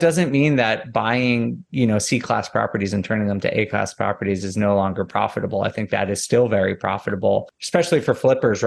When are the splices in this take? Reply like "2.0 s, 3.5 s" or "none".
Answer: 7.6 s